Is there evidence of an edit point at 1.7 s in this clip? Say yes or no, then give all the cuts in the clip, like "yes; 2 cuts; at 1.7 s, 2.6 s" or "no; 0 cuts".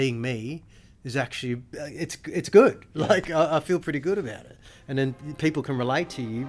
yes; 1 cut; at 1.7 s